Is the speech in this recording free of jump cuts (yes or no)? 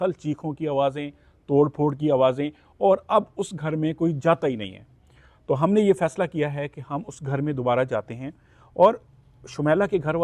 yes